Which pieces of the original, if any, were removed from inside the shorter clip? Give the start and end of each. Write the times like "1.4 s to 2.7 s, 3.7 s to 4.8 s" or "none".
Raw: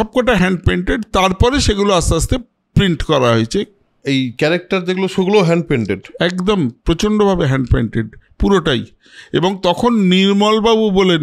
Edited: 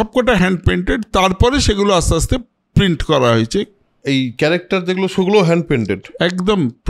none